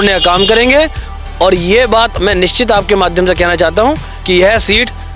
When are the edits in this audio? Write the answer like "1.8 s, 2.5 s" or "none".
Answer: none